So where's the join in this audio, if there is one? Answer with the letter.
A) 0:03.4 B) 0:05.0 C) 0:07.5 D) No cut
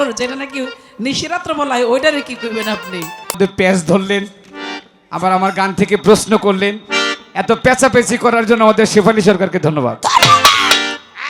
A